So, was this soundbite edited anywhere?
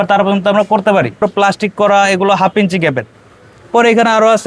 yes; 1 cut; at 1.2 s

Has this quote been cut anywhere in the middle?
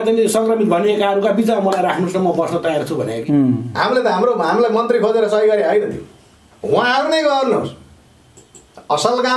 yes; 1 cut; at 3.2 s

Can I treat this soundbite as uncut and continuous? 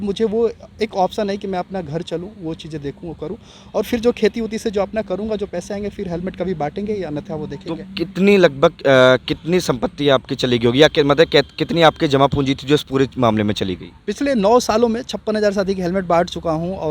yes; 0 cuts

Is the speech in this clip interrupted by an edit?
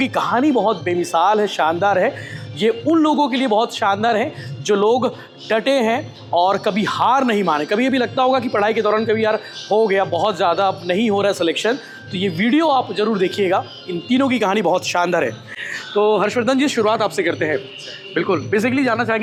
no; 0 cuts

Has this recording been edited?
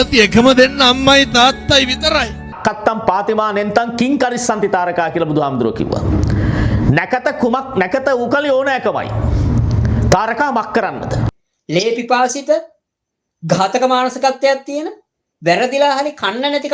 yes; 2 cuts; at 2.5 s, 11.4 s

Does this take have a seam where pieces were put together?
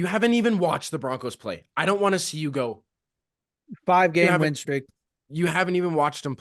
no; 0 cuts

